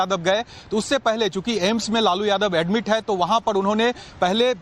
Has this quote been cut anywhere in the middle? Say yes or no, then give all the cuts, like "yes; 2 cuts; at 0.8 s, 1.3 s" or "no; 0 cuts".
no; 0 cuts